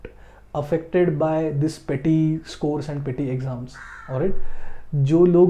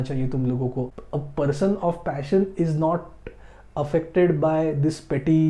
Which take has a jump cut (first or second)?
second